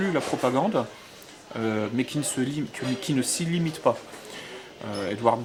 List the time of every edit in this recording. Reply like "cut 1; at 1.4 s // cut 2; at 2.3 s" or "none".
none